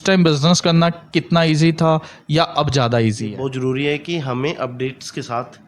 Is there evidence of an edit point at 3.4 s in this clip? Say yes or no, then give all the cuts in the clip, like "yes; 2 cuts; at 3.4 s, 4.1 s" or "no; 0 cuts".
yes; 1 cut; at 3.4 s